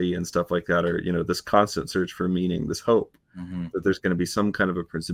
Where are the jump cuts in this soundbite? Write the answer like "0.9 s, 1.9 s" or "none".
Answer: none